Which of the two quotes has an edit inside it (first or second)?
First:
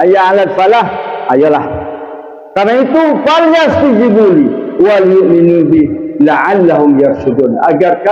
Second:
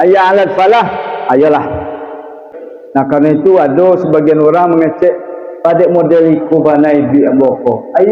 second